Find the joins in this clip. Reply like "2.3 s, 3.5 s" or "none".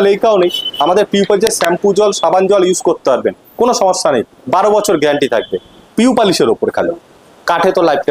none